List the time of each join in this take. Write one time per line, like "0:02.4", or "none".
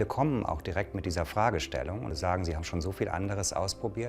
0:02.1